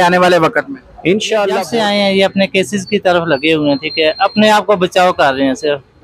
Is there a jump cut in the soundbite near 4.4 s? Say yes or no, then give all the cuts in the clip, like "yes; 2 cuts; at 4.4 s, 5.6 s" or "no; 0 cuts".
no; 1 cut; at 1.6 s